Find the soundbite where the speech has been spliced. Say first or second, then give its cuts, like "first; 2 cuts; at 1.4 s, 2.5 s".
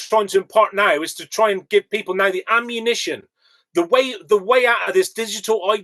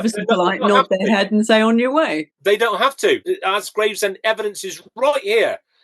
second; 2 cuts; at 2.3 s, 3.2 s